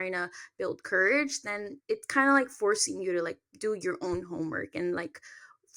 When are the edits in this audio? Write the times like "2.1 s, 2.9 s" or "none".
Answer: 1.7 s